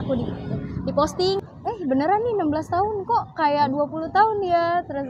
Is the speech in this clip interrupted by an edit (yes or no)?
yes